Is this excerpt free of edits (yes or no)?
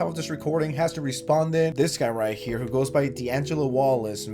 yes